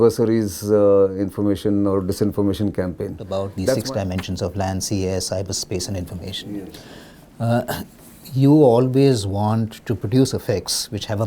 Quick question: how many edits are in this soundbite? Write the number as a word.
one